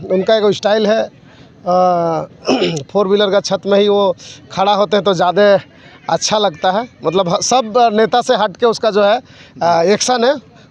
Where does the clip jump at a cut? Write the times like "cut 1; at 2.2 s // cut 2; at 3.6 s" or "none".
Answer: none

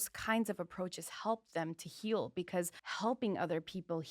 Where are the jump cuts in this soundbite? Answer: cut 1; at 2.8 s

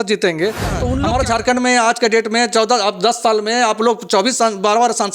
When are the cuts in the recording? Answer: cut 1; at 1.0 s

